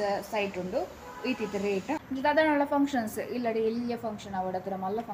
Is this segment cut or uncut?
cut